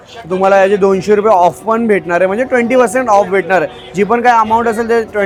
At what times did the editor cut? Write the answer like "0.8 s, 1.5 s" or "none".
none